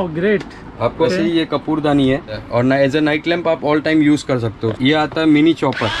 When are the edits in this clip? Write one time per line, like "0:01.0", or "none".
0:01.0
0:02.4
0:04.7